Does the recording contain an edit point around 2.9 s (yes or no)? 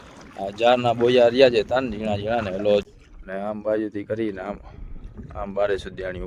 yes